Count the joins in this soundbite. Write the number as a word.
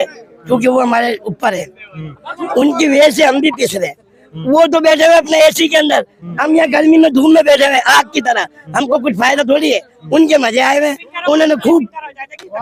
zero